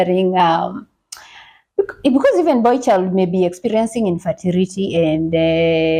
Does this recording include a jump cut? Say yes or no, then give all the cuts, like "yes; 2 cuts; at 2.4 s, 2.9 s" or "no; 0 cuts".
no; 0 cuts